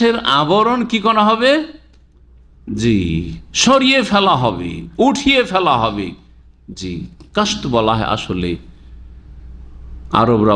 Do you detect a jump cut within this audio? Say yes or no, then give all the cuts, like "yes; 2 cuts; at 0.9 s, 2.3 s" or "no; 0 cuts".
no; 0 cuts